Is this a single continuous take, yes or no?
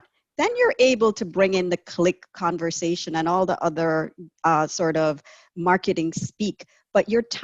yes